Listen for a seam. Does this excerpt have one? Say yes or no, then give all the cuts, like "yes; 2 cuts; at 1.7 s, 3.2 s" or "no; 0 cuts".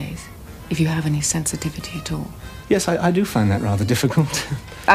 yes; 1 cut; at 2.5 s